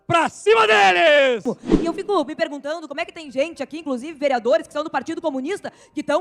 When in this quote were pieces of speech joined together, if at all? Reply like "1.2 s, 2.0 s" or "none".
1.4 s